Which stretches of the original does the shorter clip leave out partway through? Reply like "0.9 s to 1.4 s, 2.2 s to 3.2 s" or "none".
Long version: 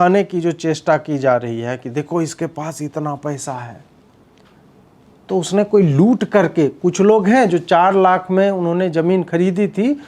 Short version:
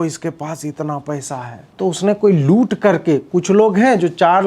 3.8 s to 5.1 s